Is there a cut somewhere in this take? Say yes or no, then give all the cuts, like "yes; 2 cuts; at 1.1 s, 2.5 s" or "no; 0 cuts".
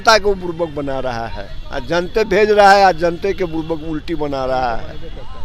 no; 0 cuts